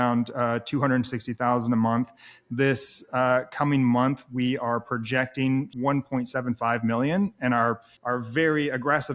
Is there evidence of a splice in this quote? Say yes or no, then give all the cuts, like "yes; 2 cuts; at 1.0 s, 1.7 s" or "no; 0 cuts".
yes; 2 cuts; at 5.7 s, 7.9 s